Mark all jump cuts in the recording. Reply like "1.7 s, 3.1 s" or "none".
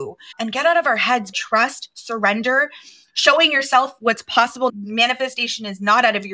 1.3 s, 4.7 s